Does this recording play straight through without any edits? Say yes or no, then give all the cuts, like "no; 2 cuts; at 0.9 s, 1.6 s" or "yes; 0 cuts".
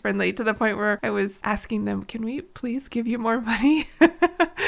no; 1 cut; at 1.2 s